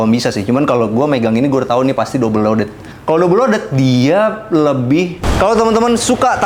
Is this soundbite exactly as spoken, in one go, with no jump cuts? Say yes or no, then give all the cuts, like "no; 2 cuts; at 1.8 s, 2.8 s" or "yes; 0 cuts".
no; 2 cuts; at 2.9 s, 5.2 s